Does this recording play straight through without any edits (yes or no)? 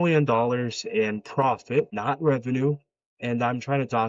no